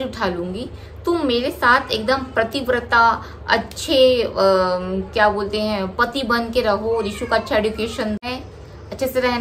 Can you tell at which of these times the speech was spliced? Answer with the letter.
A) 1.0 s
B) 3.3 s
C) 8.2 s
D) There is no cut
C